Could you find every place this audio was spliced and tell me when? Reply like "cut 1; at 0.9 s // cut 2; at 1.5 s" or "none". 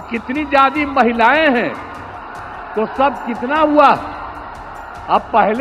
none